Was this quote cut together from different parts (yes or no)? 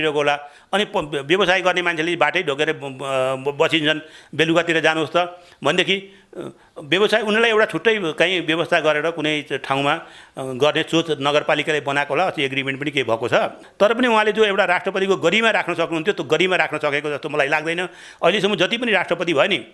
yes